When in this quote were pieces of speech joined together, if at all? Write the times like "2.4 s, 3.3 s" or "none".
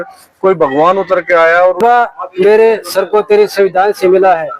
1.8 s